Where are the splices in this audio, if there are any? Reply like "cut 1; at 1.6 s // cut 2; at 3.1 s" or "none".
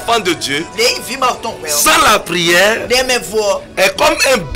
none